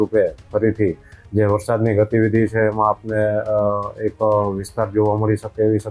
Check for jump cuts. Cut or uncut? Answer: uncut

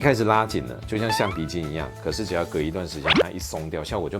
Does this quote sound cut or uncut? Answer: uncut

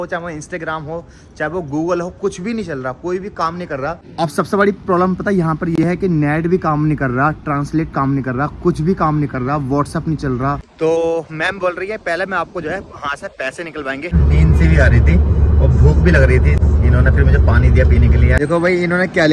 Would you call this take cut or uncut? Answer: cut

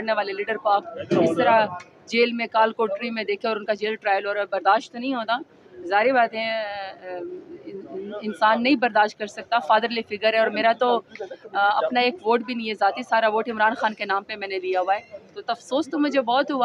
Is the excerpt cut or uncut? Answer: uncut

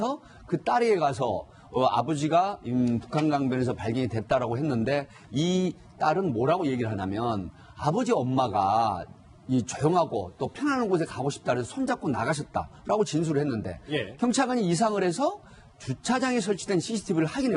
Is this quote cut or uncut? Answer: cut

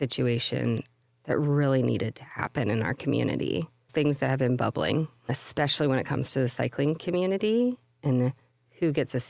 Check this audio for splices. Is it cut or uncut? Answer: cut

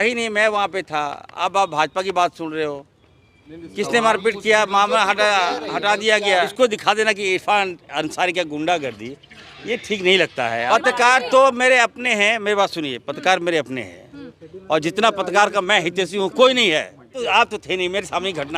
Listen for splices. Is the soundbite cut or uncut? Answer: cut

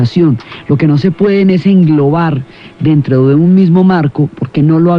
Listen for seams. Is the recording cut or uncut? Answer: cut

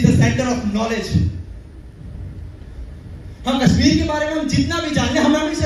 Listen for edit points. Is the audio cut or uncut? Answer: uncut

